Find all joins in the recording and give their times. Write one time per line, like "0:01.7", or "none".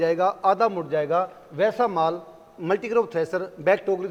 none